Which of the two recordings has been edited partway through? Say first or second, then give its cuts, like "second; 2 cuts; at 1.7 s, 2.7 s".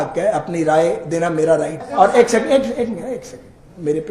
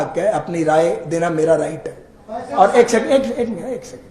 first; 1 cut; at 1.8 s